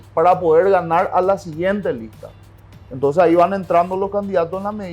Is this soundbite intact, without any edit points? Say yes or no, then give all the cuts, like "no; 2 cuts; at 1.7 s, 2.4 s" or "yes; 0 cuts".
yes; 0 cuts